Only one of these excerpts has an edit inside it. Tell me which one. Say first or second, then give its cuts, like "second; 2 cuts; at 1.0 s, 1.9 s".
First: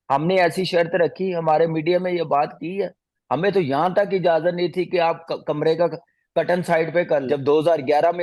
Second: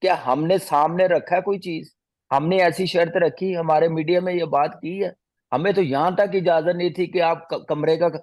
first; 1 cut; at 7.2 s